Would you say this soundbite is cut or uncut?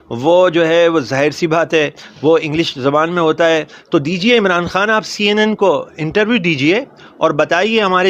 uncut